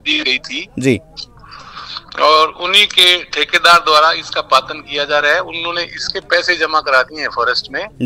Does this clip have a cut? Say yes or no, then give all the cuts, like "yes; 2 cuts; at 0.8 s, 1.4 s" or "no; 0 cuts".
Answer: no; 0 cuts